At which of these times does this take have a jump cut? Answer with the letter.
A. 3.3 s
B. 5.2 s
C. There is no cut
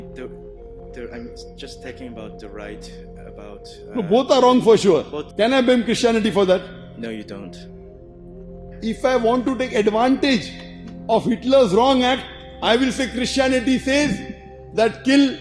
B